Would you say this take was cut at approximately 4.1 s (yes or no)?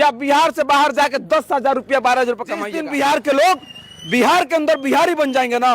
no